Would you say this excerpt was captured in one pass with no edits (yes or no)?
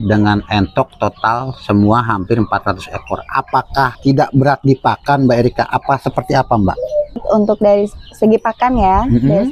no